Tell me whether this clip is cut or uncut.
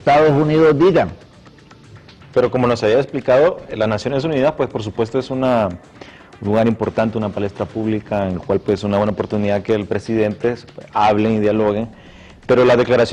cut